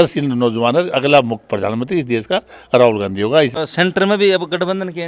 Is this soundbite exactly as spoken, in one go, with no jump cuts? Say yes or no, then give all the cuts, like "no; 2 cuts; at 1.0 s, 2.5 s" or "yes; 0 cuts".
no; 1 cut; at 3.5 s